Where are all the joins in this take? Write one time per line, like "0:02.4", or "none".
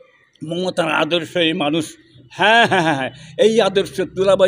none